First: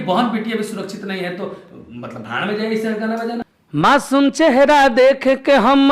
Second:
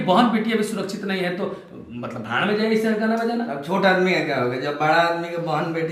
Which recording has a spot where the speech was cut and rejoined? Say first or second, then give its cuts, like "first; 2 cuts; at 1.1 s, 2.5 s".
first; 1 cut; at 3.5 s